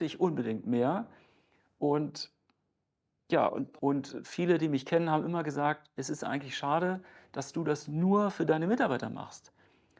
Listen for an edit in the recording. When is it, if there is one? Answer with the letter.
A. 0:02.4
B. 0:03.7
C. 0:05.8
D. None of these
B